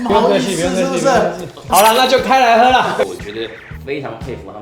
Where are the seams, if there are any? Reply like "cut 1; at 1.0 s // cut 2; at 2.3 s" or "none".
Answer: cut 1; at 3.1 s